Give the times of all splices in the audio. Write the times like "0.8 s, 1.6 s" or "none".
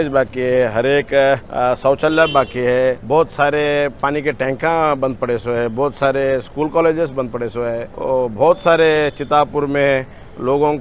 1.5 s, 3.0 s, 7.9 s